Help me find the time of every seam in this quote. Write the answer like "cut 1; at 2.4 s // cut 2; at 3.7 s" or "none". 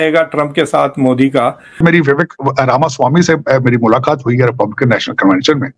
cut 1; at 1.8 s

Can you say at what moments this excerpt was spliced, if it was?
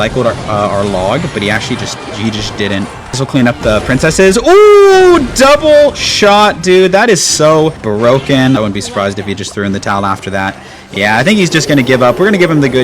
cut 1; at 3.1 s // cut 2; at 7.8 s // cut 3; at 8.6 s

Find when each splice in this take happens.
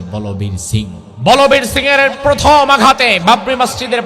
cut 1; at 1.1 s

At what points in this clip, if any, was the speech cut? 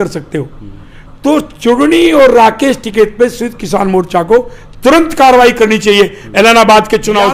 none

